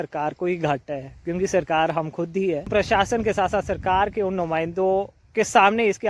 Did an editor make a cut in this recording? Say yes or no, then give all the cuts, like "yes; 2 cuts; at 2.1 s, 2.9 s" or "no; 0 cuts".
yes; 1 cut; at 2.7 s